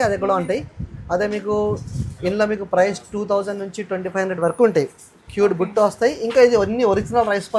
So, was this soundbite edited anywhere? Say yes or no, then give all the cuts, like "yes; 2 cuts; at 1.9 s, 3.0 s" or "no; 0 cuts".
no; 0 cuts